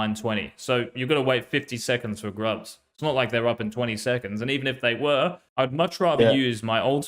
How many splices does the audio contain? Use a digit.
1